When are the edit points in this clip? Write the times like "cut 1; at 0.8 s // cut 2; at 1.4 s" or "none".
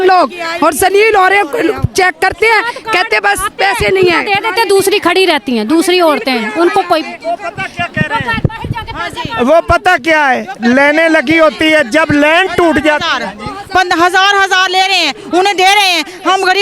none